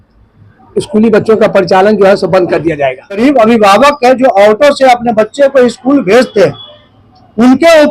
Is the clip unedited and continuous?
no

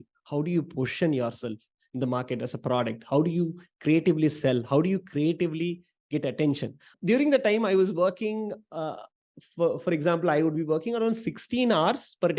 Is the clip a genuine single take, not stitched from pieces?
no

